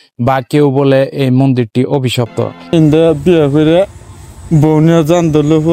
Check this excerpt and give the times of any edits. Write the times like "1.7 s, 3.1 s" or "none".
2.6 s